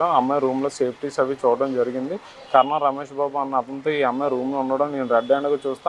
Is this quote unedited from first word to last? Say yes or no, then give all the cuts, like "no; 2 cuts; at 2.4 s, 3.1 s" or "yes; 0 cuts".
no; 1 cut; at 2.4 s